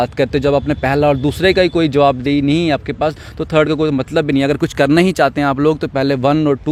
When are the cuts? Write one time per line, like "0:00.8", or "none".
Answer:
none